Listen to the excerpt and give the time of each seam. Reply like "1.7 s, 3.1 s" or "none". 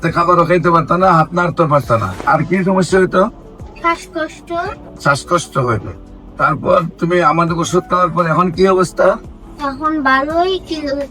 2.2 s, 4.9 s